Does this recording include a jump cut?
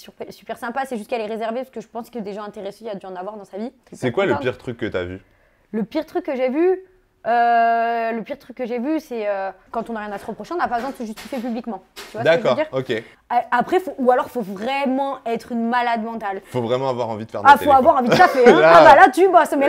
yes; 3 cuts; at 3.9 s, 9.7 s, 13.1 s

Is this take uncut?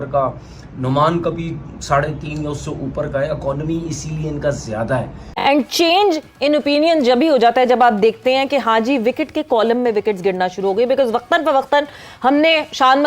no; 1 cut; at 5.3 s

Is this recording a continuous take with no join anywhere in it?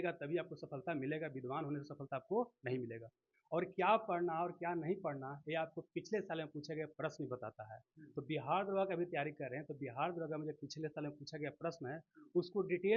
yes; 0 cuts

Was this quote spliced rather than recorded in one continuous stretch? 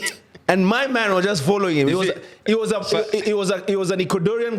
no; 0 cuts

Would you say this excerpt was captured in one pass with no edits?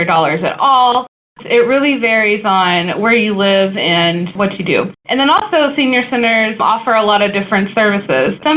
no; 2 cuts; at 1.1 s, 4.5 s

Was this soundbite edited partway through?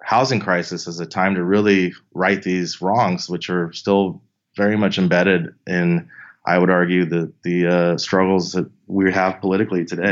no; 0 cuts

